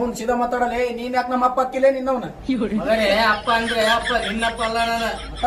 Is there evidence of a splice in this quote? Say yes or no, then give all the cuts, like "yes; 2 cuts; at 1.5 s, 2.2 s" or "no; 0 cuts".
no; 0 cuts